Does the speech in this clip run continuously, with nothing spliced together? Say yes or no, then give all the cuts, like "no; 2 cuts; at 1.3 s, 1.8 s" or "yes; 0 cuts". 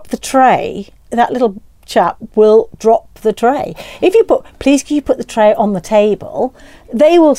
no; 1 cut; at 1.0 s